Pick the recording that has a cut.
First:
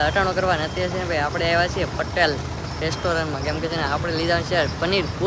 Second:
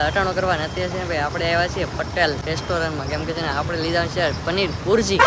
second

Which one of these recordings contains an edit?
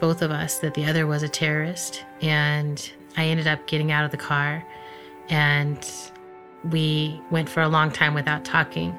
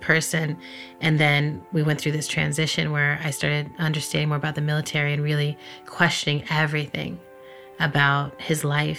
first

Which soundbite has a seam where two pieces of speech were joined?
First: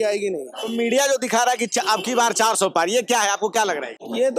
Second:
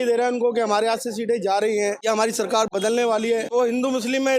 second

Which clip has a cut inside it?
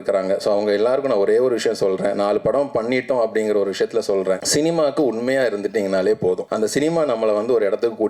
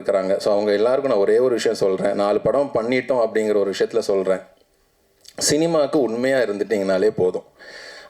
first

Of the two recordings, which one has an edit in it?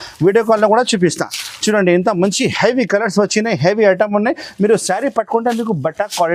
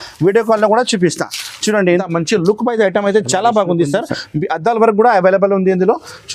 second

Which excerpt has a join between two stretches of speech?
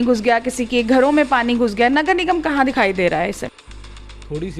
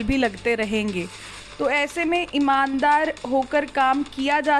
first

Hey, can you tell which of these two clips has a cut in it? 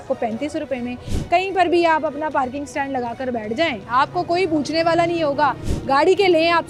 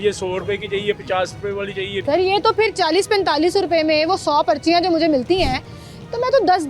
second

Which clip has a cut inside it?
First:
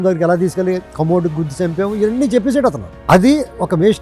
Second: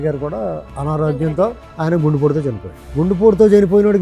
second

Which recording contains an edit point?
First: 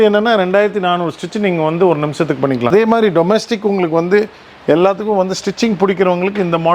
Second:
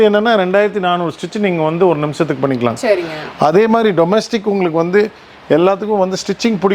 first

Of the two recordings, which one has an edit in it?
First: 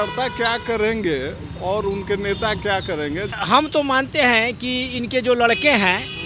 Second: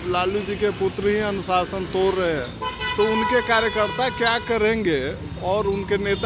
first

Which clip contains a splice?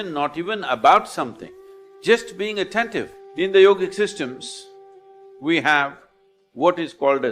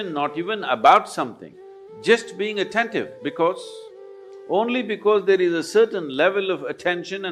first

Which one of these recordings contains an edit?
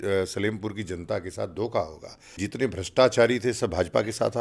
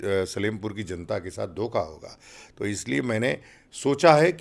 first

